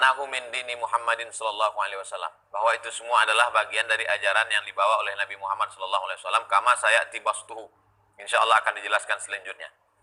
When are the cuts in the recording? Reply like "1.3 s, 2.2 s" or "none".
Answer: none